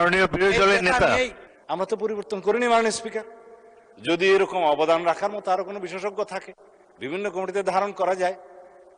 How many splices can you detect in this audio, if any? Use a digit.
1